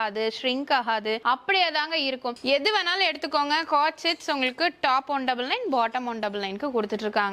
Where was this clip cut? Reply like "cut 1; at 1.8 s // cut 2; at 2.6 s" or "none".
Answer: cut 1; at 1.2 s // cut 2; at 2.4 s